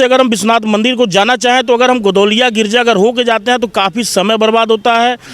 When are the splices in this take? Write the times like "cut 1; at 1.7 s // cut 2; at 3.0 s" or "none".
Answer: none

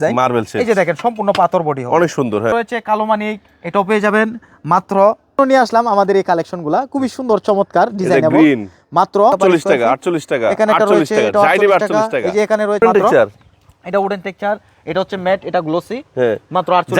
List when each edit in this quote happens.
cut 1; at 2.5 s // cut 2; at 5.4 s // cut 3; at 9.3 s // cut 4; at 12.8 s

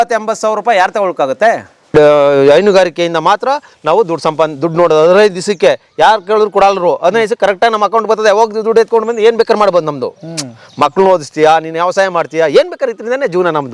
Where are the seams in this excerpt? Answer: cut 1; at 1.8 s

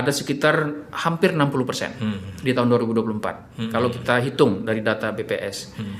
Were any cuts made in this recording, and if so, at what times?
none

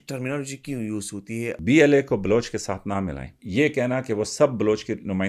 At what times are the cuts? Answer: cut 1; at 1.6 s // cut 2; at 3.4 s

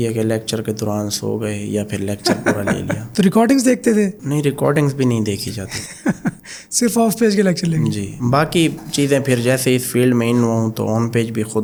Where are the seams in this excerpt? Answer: none

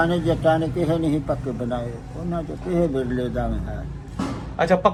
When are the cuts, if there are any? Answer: none

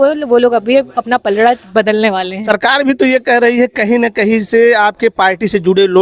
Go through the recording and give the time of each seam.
cut 1; at 2.4 s

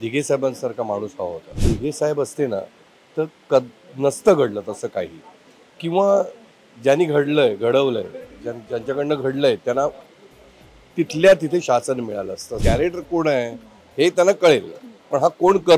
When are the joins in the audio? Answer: cut 1; at 1.6 s // cut 2; at 12.5 s

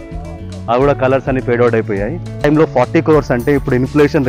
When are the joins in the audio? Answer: cut 1; at 2.4 s

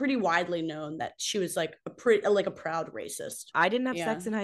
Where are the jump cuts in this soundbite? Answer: cut 1; at 3.5 s

